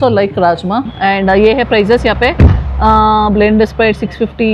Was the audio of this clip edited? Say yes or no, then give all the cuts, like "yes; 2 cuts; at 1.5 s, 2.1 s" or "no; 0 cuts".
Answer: yes; 1 cut; at 0.9 s